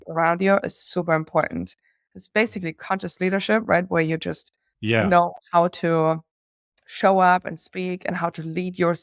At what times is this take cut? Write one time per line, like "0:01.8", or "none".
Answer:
none